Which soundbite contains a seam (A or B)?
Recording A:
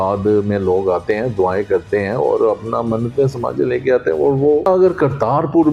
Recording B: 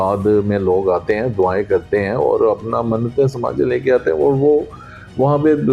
A